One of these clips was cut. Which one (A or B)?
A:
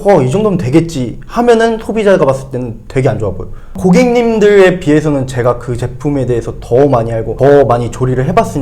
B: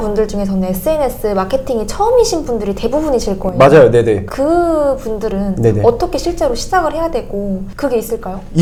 A